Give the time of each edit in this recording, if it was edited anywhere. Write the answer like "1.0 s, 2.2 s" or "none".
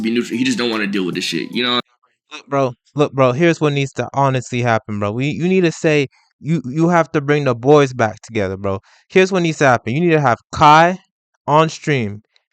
none